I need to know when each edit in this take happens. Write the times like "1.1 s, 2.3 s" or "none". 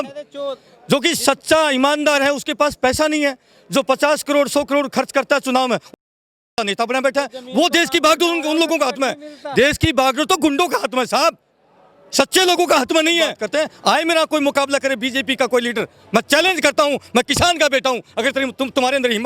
13.4 s